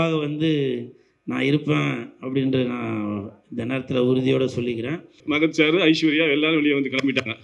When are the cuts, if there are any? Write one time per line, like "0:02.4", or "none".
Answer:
0:05.2